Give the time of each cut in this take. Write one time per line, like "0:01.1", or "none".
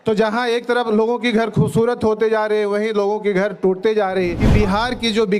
0:04.4